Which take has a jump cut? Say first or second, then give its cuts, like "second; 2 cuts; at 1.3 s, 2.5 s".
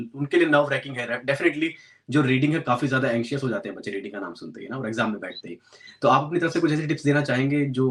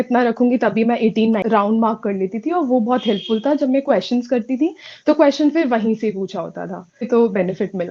second; 2 cuts; at 1.4 s, 7.1 s